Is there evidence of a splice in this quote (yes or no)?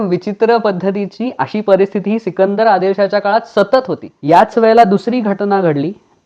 yes